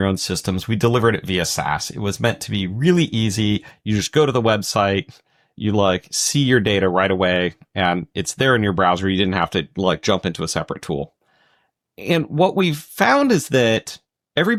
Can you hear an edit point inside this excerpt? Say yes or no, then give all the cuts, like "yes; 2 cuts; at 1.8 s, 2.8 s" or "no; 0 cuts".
no; 0 cuts